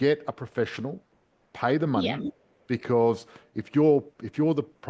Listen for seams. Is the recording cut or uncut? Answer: uncut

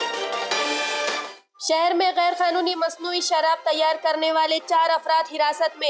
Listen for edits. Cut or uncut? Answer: uncut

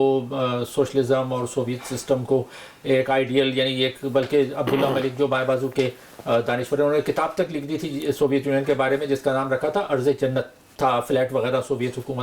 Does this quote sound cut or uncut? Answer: cut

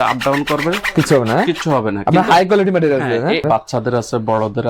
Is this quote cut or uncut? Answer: cut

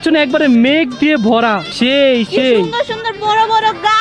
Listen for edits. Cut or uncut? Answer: cut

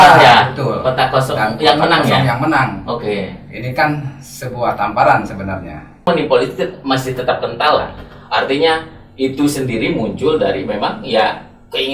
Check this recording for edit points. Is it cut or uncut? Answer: cut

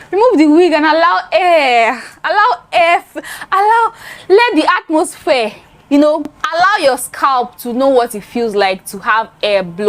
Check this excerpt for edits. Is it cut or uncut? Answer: cut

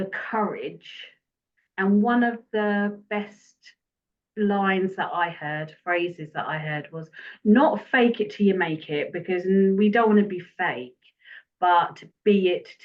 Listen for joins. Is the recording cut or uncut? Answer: uncut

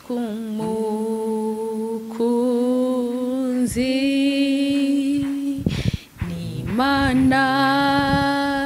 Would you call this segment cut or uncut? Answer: uncut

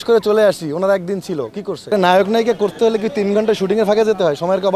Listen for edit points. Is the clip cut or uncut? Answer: cut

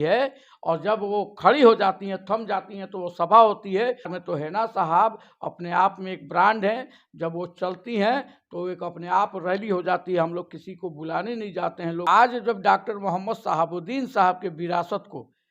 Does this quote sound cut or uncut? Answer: cut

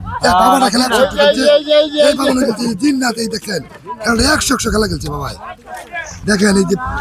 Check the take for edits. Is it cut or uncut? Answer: uncut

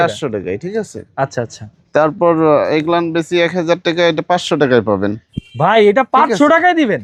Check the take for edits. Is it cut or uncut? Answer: uncut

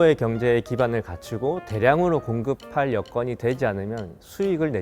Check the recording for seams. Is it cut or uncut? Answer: uncut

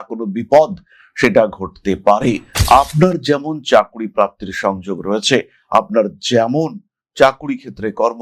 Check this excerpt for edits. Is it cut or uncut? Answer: cut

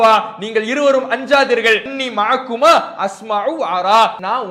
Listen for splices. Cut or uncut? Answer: uncut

